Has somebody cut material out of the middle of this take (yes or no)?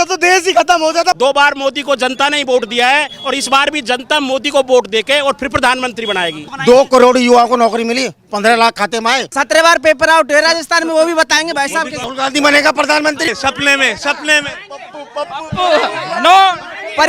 yes